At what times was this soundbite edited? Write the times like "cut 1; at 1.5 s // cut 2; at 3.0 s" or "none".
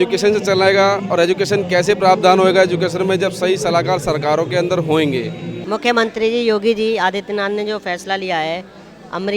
cut 1; at 5.5 s

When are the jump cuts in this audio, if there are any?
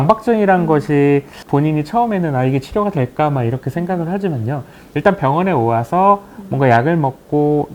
cut 1; at 1.4 s

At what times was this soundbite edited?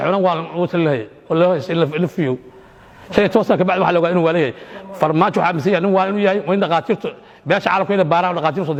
none

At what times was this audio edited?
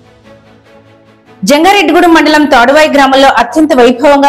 cut 1; at 1.4 s

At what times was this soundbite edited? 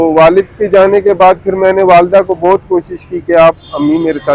none

